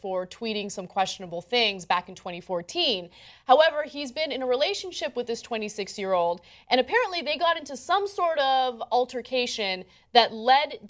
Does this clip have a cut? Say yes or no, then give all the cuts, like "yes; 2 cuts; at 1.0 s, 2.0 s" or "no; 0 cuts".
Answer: yes; 1 cut; at 4.3 s